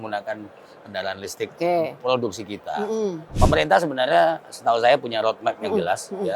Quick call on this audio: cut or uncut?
cut